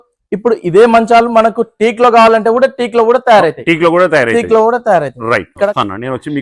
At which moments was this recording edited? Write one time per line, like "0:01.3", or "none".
none